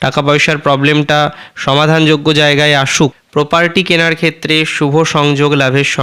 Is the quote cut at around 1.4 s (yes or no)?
no